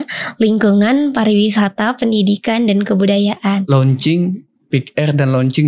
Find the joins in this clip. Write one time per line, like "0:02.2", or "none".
0:03.6